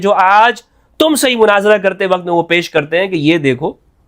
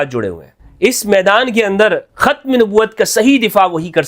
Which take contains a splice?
second; 1 cut; at 2.1 s

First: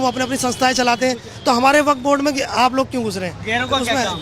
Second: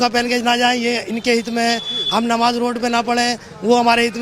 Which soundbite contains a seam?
first; 1 cut; at 1.3 s

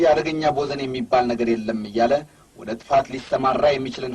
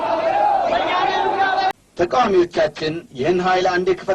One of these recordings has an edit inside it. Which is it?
second; 1 cut; at 1.7 s

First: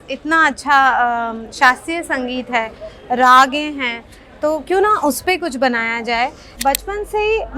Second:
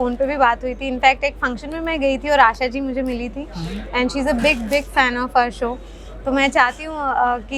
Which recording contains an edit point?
first; 1 cut; at 6.5 s

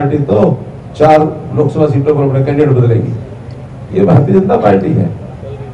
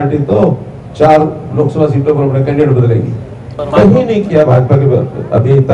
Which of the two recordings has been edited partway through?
second; 1 cut; at 3.5 s

